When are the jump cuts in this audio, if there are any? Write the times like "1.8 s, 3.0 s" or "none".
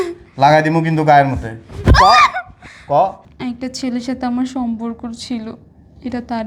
3.3 s